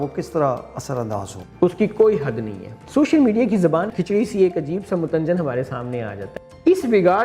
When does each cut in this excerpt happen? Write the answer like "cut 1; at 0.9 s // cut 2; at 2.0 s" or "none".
cut 1; at 1.4 s // cut 2; at 2.8 s // cut 3; at 3.9 s // cut 4; at 6.3 s